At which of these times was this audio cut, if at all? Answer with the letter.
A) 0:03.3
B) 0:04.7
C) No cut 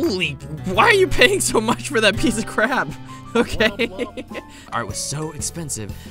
B